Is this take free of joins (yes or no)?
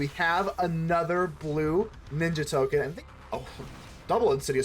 no